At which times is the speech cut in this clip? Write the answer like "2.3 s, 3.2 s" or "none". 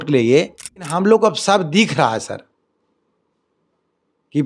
0.9 s